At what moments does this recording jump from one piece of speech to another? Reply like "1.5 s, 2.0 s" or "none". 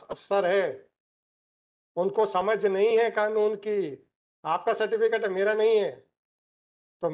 none